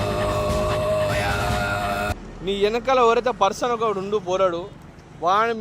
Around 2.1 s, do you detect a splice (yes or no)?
yes